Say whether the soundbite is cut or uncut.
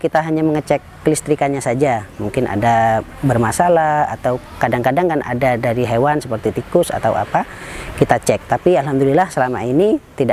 uncut